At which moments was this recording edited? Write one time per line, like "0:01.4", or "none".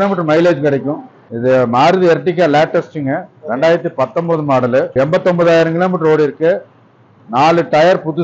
0:01.3
0:04.9